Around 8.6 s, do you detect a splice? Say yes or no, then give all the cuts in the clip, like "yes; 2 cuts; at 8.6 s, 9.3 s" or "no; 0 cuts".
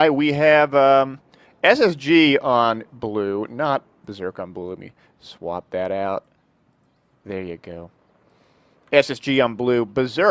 yes; 1 cut; at 8.6 s